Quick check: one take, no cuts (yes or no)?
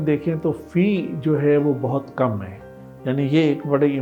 yes